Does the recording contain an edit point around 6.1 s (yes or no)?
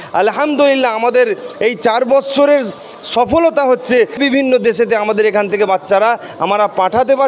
no